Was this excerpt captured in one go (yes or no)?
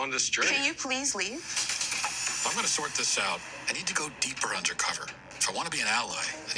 no